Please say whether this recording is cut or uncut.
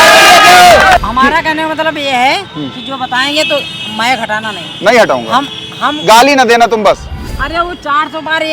cut